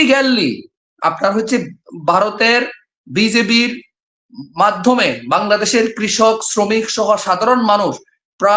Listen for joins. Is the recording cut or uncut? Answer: uncut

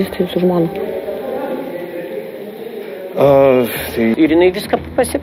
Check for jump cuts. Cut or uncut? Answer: cut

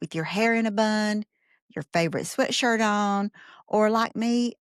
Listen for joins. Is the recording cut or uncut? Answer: uncut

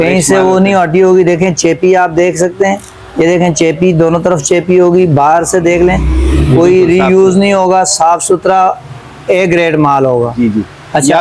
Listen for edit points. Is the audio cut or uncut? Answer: uncut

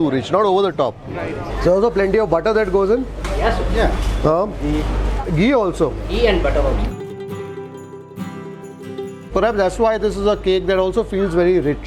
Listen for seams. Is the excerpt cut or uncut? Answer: cut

